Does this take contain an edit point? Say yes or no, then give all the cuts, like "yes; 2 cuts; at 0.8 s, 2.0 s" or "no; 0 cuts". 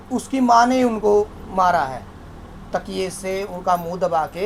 no; 0 cuts